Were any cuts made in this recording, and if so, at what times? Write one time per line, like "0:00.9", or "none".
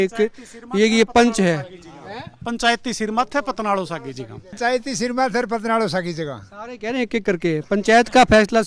0:04.4